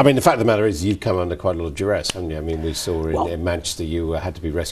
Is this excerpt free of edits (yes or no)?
yes